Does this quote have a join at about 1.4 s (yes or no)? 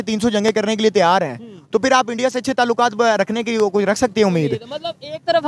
no